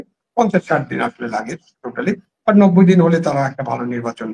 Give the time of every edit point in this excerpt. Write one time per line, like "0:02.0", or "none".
none